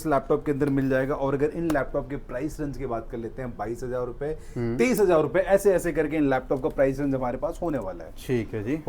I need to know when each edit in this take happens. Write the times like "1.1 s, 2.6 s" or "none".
none